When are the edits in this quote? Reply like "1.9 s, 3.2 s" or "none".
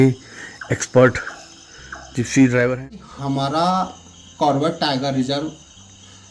3.0 s